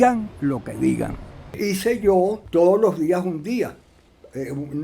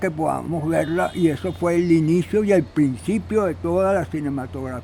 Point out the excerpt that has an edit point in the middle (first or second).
first